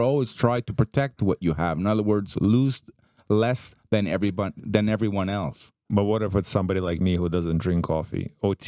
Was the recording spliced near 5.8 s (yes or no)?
yes